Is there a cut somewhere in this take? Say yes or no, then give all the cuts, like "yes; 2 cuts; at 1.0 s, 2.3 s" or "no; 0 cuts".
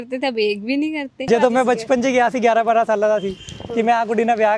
yes; 1 cut; at 1.2 s